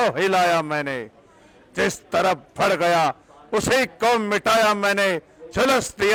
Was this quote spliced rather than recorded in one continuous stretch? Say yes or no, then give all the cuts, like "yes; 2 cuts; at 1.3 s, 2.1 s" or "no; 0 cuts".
no; 0 cuts